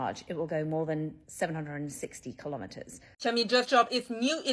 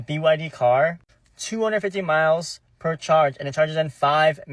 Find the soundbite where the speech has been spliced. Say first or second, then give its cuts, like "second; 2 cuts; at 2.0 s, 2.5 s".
first; 1 cut; at 3.1 s